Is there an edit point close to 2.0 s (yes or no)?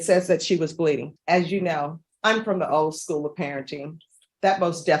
yes